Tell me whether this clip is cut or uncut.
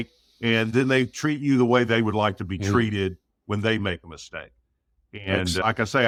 uncut